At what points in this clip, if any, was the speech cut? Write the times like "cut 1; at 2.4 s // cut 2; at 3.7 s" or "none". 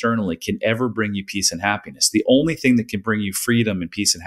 none